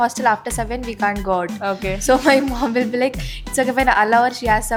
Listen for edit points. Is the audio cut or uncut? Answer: uncut